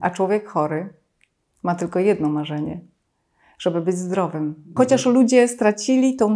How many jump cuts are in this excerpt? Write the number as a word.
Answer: one